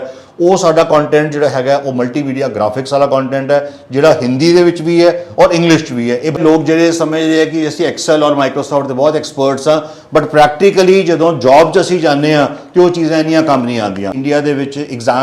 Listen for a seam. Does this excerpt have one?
yes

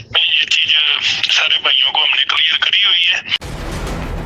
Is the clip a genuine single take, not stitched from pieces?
no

